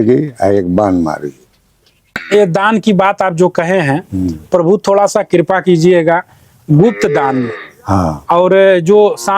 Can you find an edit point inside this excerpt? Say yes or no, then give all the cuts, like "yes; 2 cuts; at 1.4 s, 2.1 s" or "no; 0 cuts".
yes; 1 cut; at 2.2 s